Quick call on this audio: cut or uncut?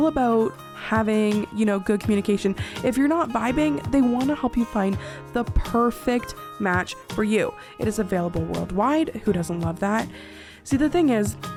uncut